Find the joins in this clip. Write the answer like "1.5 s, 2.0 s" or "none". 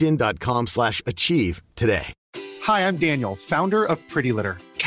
2.2 s